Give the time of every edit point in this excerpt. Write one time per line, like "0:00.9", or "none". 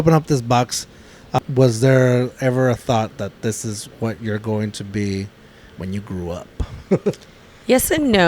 0:01.4